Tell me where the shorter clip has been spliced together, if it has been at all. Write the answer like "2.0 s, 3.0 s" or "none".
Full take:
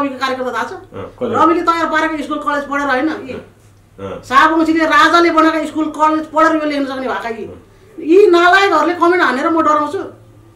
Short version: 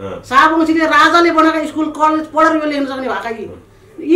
none

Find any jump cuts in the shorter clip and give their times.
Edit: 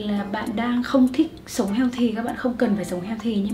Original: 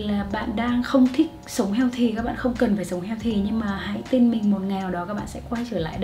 none

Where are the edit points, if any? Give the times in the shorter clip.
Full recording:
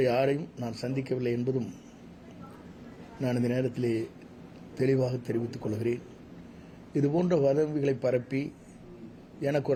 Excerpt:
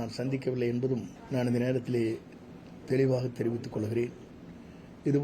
1.2 s

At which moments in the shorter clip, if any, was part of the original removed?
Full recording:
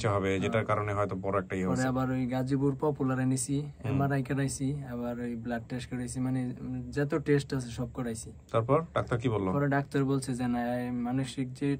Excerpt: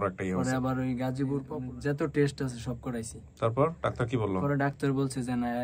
1.5 s

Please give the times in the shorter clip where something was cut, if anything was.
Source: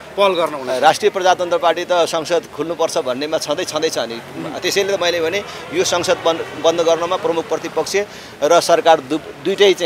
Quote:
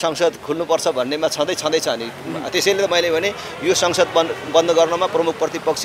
none

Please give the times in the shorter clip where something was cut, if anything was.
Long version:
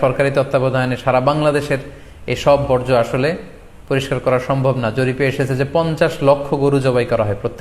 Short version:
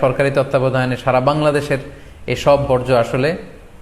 none

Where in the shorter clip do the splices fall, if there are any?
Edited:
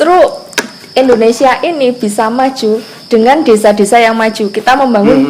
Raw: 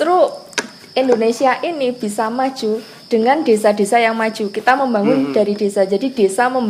none

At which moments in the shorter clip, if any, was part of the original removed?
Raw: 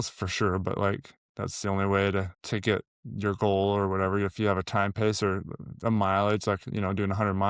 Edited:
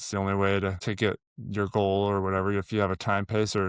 1.1 s

